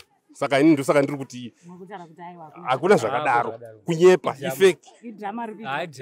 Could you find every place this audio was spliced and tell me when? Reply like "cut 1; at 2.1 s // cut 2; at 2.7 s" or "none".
none